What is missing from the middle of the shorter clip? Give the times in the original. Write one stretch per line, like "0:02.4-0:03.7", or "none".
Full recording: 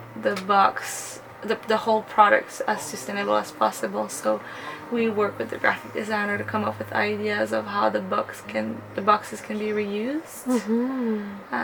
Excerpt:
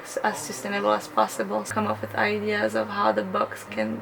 0:04.1-0:06.5